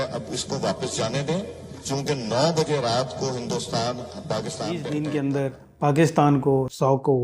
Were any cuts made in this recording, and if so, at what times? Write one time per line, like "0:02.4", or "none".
0:04.9